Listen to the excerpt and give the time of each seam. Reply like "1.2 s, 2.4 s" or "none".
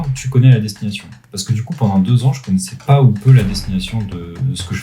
2.7 s

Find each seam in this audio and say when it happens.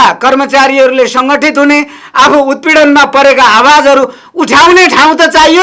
none

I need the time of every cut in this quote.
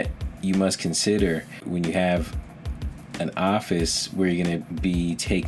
1.7 s

